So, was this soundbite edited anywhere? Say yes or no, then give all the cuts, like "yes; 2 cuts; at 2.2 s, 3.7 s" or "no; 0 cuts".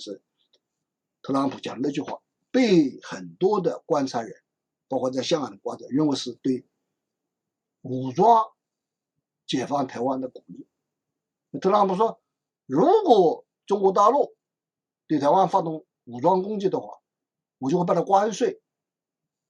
no; 0 cuts